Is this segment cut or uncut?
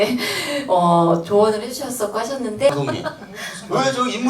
cut